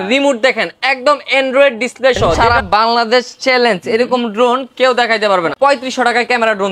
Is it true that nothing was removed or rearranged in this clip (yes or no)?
no